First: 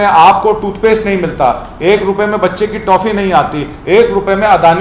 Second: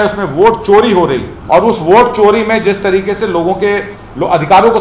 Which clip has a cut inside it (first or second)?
second